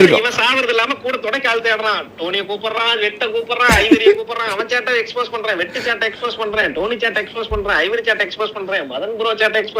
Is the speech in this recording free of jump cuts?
yes; 0 cuts

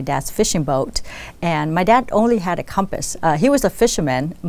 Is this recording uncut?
yes; 0 cuts

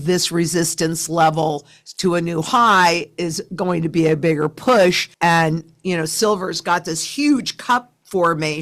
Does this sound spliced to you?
no; 0 cuts

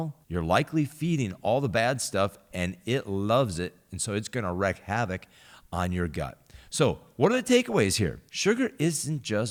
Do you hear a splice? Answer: no; 0 cuts

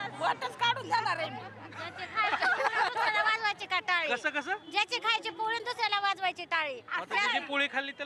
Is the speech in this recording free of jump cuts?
yes; 0 cuts

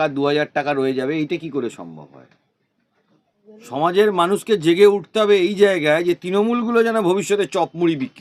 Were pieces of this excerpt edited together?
yes; 1 cut; at 3.3 s

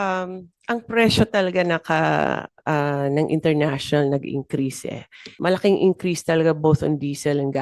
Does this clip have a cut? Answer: yes; 1 cut; at 5.3 s

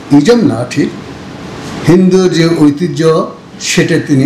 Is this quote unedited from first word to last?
yes; 0 cuts

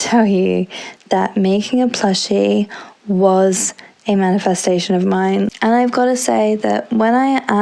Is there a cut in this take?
yes; 1 cut; at 5.5 s

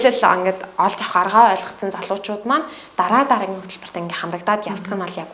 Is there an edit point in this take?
no; 0 cuts

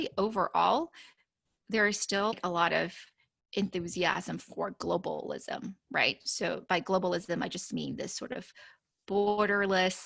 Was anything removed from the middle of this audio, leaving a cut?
yes; 1 cut; at 2.4 s

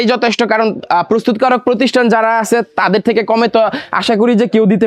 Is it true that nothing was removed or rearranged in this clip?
yes; 0 cuts

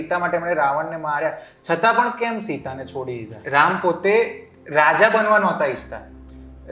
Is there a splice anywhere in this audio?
yes; 1 cut; at 3.4 s

